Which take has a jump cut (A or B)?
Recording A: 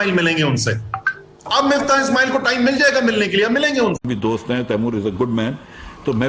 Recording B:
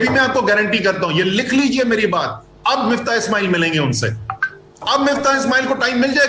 A